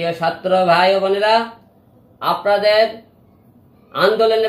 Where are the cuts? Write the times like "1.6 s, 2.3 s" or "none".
none